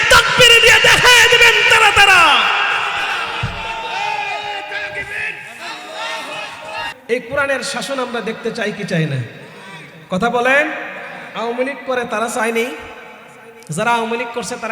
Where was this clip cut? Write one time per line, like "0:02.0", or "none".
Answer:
0:07.0